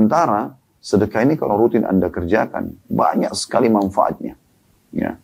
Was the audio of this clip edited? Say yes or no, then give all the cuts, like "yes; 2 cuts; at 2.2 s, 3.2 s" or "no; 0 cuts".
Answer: no; 0 cuts